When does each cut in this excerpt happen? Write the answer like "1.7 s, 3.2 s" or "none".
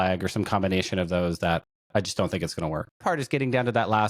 1.8 s, 3.0 s